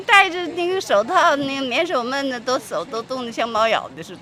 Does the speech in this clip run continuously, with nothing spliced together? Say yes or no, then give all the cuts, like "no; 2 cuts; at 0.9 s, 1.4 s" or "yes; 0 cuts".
yes; 0 cuts